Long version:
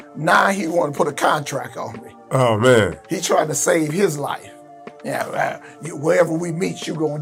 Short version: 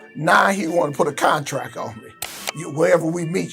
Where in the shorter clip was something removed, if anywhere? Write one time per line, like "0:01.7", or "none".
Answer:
0:02.3